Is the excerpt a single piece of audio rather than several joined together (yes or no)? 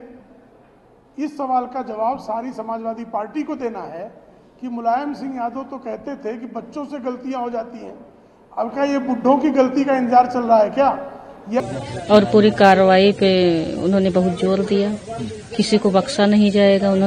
no